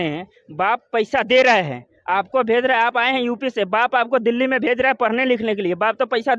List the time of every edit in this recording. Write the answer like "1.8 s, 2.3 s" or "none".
none